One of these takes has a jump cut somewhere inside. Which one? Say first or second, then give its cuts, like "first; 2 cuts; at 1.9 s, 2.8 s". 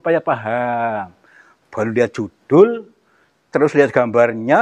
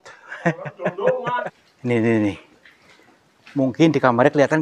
second; 1 cut; at 1.5 s